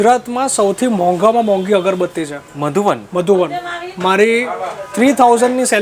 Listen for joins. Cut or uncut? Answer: uncut